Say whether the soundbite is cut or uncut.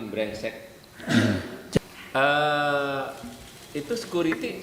cut